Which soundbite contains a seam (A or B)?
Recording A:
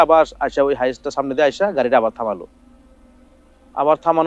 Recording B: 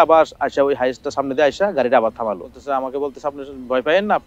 B